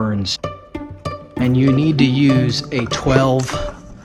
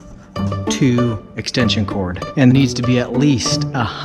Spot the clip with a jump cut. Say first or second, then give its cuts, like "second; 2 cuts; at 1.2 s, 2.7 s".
second; 1 cut; at 2.5 s